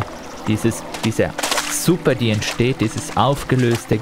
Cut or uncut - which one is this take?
uncut